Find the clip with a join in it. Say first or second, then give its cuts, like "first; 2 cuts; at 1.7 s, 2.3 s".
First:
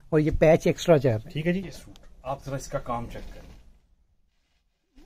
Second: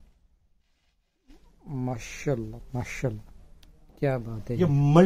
first; 1 cut; at 1.7 s